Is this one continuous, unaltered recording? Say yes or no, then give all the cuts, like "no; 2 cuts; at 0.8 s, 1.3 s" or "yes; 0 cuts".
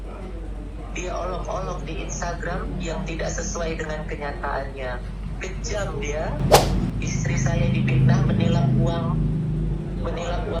yes; 0 cuts